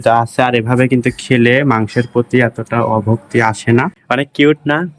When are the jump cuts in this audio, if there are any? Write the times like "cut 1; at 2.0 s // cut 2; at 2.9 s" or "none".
cut 1; at 4.0 s

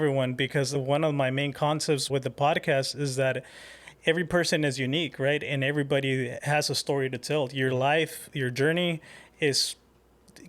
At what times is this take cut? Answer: cut 1; at 0.8 s // cut 2; at 2.0 s // cut 3; at 6.4 s

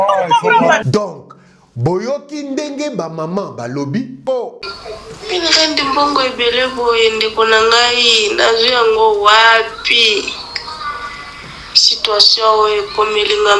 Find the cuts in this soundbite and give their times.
cut 1; at 4.2 s

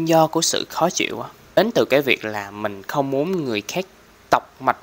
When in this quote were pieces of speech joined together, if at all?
cut 1; at 1.6 s

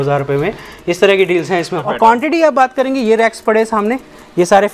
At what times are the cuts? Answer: cut 1; at 1.8 s

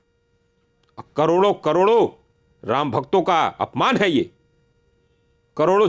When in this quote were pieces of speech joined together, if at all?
none

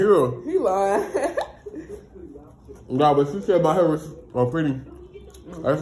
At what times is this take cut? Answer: cut 1; at 3.4 s

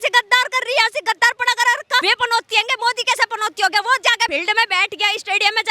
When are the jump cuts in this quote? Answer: cut 1; at 2.0 s // cut 2; at 4.3 s

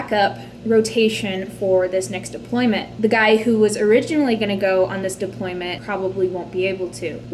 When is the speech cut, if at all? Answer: cut 1; at 2.9 s // cut 2; at 5.8 s

